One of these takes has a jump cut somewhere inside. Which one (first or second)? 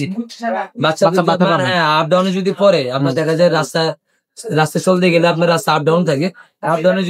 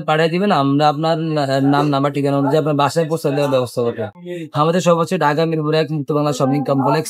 second